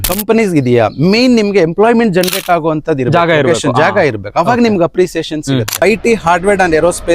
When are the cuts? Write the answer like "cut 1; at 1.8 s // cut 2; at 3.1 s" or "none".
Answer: cut 1; at 5.8 s